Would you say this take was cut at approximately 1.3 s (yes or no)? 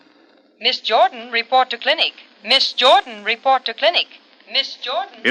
yes